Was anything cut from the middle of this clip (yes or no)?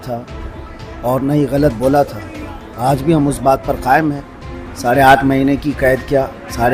no